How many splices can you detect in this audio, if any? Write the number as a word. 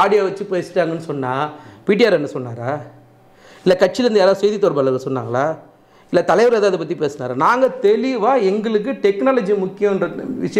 zero